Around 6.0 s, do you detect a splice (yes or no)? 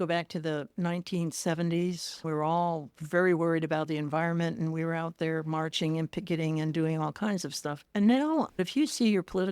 no